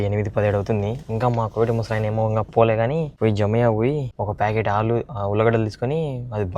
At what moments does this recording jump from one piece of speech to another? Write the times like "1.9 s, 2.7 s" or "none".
3.1 s, 4.1 s